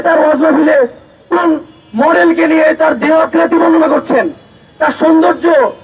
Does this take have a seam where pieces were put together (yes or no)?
no